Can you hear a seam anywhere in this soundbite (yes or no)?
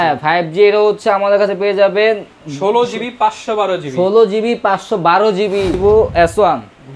yes